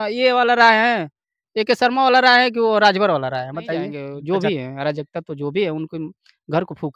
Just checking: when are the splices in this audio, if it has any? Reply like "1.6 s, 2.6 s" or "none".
4.1 s